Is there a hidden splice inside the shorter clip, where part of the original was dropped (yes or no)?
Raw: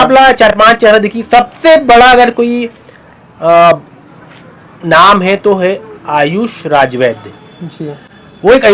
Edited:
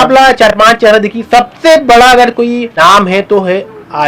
yes